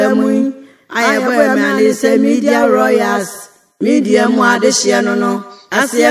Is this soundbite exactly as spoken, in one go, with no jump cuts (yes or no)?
yes